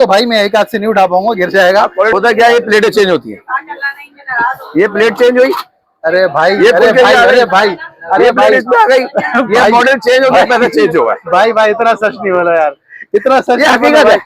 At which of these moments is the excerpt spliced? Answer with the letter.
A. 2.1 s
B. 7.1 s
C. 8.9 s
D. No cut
A